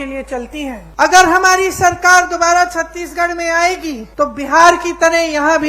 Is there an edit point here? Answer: yes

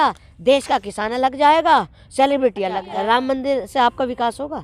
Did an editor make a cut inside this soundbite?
yes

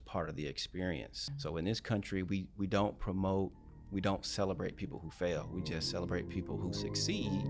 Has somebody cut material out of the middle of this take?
yes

